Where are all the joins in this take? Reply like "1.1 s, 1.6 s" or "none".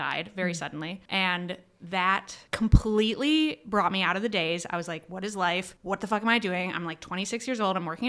1.0 s, 2.4 s, 5.7 s